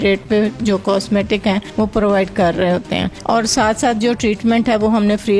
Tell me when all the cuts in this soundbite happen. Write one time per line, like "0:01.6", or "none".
0:01.7
0:03.1